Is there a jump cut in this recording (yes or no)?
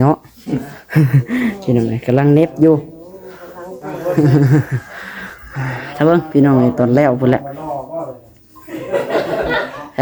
no